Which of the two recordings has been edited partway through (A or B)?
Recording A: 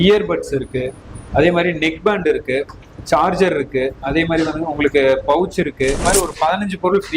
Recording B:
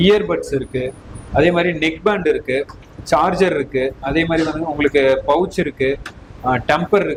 A